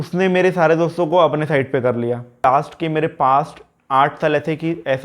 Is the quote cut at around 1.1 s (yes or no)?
no